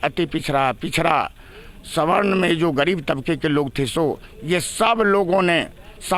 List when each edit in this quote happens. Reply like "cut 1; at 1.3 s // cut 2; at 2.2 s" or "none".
none